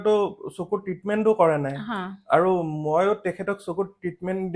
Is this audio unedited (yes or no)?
yes